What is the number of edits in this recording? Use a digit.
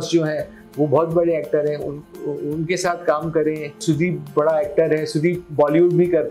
1